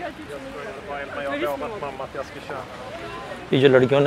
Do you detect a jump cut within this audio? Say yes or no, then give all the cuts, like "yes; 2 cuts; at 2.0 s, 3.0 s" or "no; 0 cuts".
no; 0 cuts